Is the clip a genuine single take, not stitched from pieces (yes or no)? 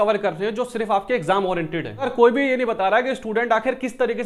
no